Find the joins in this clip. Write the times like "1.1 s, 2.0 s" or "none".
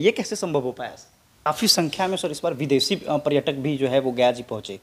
1.5 s